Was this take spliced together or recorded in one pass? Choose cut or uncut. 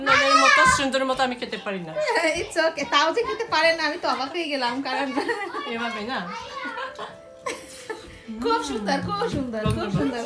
uncut